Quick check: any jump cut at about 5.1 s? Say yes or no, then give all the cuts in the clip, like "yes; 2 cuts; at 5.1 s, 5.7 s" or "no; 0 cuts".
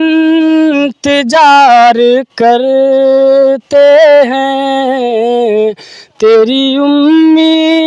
no; 0 cuts